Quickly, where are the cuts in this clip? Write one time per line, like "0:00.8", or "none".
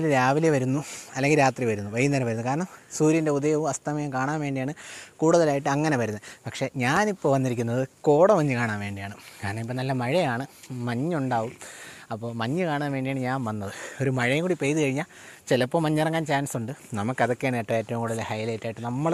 none